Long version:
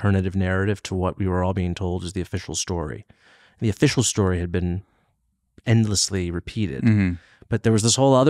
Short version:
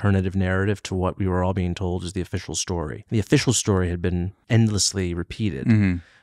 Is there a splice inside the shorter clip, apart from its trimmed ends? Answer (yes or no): yes